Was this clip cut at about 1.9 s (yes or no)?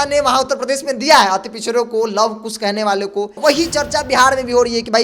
no